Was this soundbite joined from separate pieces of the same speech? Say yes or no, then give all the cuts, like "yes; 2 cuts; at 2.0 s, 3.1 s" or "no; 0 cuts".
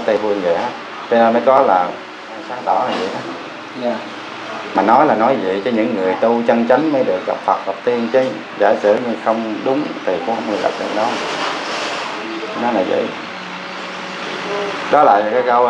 no; 0 cuts